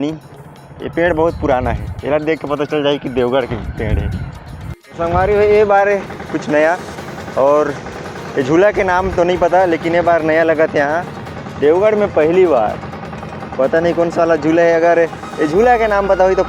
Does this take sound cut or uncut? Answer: cut